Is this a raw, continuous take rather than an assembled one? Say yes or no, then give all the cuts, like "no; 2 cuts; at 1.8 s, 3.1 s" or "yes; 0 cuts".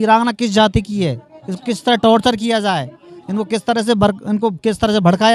yes; 0 cuts